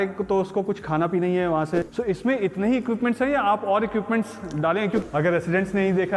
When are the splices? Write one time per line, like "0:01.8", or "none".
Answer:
0:01.8
0:05.0